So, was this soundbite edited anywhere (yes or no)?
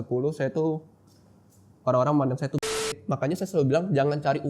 yes